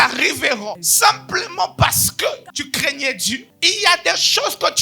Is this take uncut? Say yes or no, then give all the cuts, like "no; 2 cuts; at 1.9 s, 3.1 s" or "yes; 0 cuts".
no; 3 cuts; at 0.8 s, 2.5 s, 3.5 s